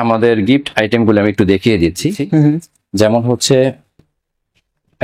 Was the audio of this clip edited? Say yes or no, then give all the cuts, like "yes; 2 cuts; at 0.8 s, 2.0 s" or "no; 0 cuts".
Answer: yes; 1 cut; at 2.2 s